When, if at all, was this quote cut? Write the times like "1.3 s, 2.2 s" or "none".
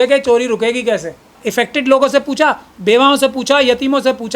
1.4 s

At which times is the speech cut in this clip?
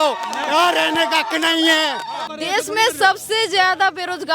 2.2 s

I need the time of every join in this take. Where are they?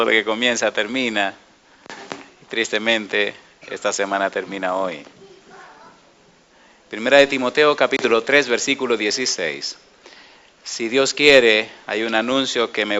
none

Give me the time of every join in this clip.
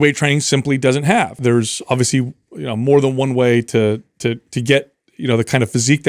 1.4 s

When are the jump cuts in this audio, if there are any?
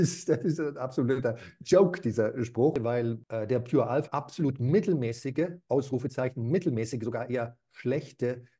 2.8 s, 4.0 s

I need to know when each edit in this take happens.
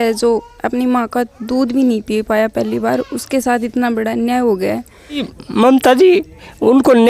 5.4 s

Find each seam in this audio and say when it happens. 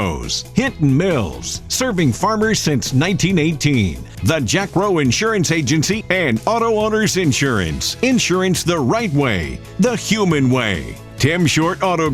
none

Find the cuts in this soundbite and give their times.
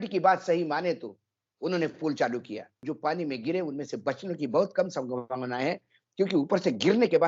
2.8 s

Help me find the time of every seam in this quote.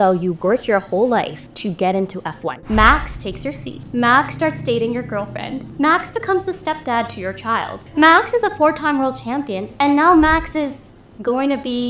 1.4 s, 2.5 s, 3.7 s, 5.6 s, 7.8 s

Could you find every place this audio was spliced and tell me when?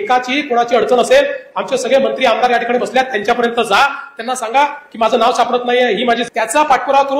6.3 s

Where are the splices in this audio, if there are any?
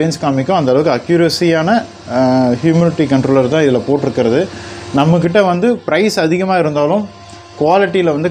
none

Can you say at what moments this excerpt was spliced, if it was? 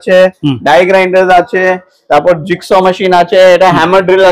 none

